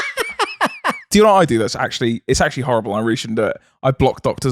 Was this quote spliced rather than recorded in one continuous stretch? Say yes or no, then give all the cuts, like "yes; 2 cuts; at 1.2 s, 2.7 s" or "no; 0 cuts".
yes; 1 cut; at 1.1 s